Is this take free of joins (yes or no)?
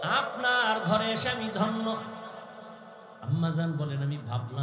yes